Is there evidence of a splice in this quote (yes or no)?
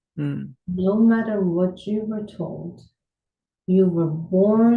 no